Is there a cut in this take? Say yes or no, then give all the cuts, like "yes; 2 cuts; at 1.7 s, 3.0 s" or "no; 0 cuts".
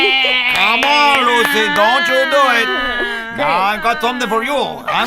yes; 1 cut; at 4.0 s